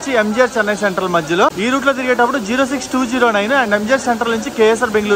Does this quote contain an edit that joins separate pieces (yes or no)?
no